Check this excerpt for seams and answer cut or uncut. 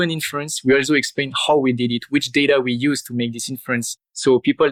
uncut